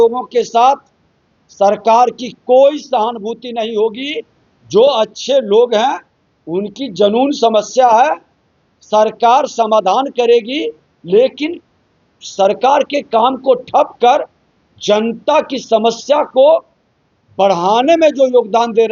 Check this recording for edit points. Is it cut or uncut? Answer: uncut